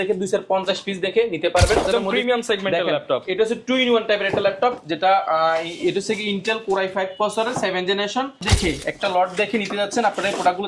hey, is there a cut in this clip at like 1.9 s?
yes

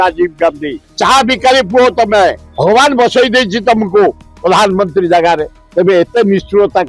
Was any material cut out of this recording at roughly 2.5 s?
no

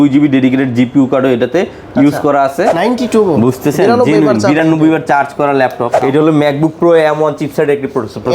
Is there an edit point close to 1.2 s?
no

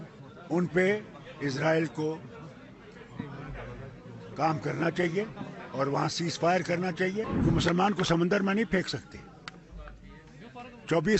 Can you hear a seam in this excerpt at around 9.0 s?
no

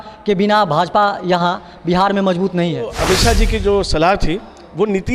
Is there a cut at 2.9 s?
yes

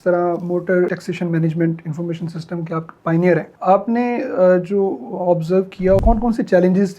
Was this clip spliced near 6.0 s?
no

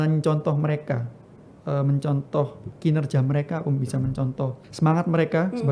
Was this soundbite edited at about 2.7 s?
yes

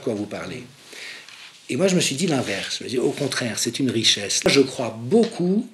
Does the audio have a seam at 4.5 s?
yes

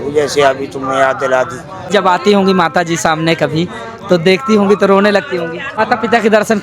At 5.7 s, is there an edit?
yes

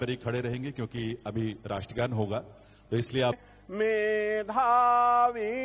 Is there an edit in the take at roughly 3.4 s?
yes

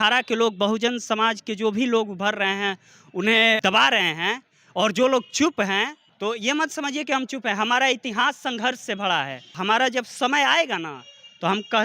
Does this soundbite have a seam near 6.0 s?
yes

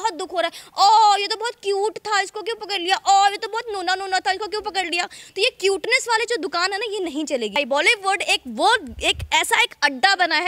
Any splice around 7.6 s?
yes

